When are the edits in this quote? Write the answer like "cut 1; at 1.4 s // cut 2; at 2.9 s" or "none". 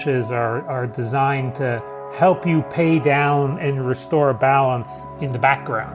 cut 1; at 5.0 s